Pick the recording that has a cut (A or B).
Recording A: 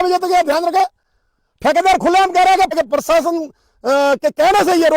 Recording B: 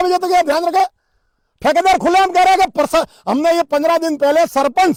A